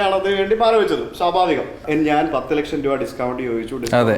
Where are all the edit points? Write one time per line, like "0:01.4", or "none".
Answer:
0:01.8